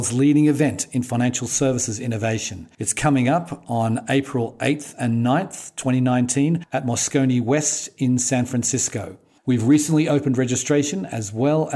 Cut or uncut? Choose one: uncut